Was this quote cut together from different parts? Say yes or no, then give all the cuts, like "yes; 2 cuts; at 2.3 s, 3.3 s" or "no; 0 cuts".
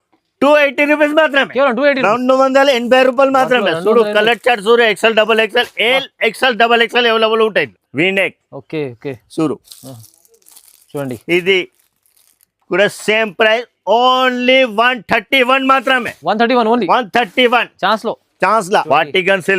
yes; 2 cuts; at 7.8 s, 18.9 s